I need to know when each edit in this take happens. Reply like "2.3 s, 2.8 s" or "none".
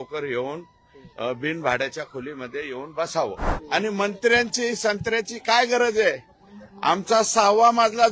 3.5 s